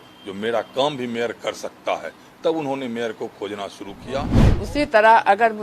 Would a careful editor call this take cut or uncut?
cut